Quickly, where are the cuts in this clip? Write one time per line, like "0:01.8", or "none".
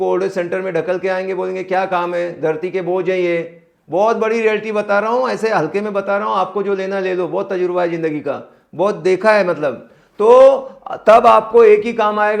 none